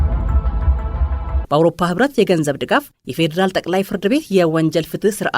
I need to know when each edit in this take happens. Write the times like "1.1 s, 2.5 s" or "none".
1.0 s